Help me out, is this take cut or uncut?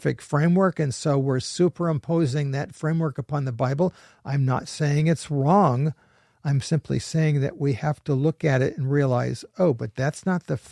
uncut